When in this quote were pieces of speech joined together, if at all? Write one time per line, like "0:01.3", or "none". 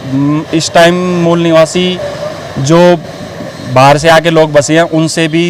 none